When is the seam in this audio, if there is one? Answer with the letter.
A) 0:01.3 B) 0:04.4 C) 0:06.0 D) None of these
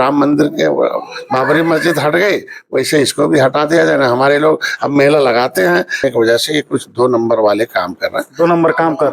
C